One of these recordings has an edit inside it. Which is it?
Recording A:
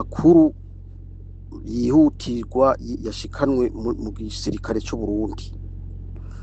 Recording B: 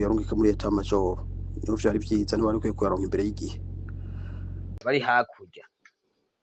B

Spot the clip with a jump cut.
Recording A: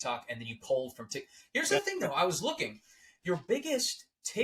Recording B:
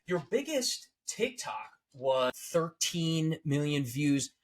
B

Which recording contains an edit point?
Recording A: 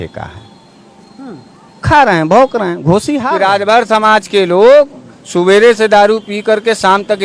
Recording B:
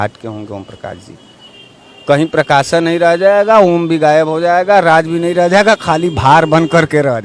A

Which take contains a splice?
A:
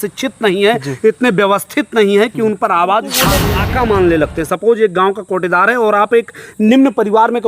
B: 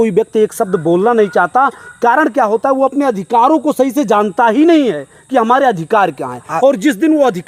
A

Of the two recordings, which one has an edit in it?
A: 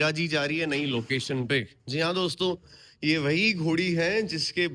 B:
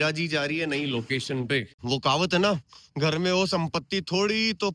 B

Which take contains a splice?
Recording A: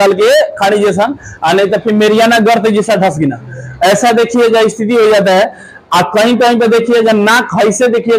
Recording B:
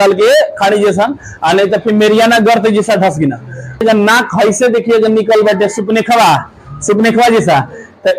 B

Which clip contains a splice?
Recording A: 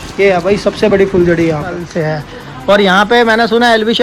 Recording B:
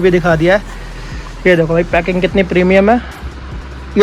A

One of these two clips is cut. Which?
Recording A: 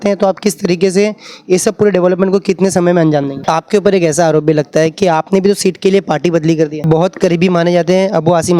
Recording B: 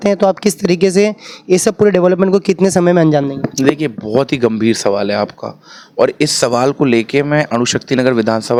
A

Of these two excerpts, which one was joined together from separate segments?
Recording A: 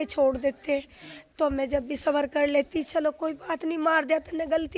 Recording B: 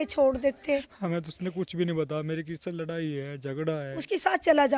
B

